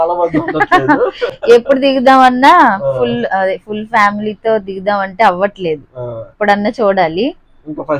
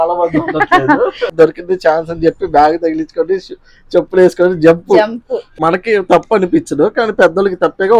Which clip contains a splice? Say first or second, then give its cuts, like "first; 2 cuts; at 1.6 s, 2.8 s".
second; 2 cuts; at 1.3 s, 5.5 s